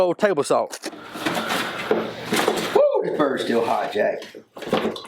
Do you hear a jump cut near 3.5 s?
no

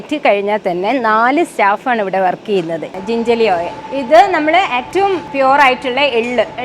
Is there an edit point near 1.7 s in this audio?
no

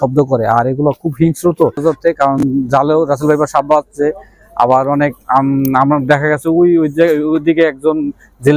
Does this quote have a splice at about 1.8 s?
yes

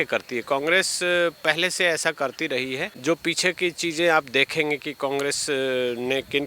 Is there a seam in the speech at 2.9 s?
yes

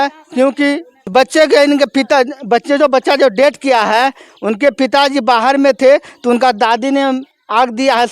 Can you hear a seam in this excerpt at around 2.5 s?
no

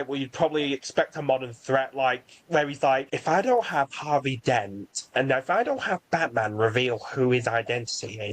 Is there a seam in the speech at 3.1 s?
yes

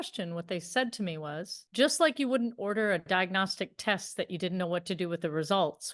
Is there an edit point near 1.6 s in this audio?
yes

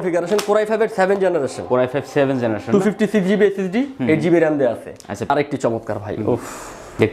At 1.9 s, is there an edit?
no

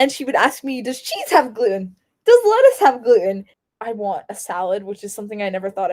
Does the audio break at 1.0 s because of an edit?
no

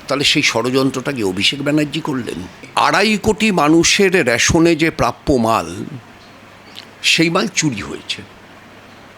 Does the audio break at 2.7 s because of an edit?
yes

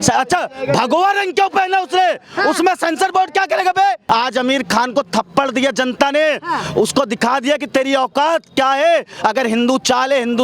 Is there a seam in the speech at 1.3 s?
no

